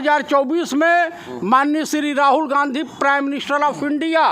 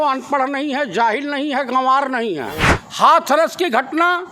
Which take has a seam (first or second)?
second